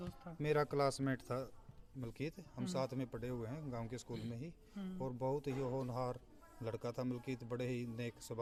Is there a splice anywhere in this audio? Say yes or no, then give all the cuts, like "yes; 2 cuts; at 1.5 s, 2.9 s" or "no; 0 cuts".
no; 0 cuts